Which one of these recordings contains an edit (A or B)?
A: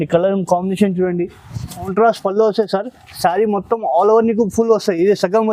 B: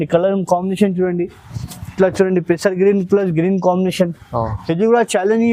A